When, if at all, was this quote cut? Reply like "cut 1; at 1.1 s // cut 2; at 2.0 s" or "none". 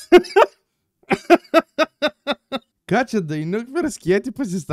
cut 1; at 2.7 s